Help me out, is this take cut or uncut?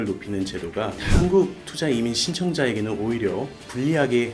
cut